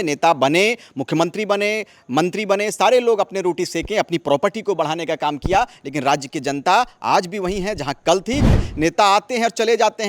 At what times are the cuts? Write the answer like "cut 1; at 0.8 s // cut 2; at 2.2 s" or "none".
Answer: cut 1; at 8.6 s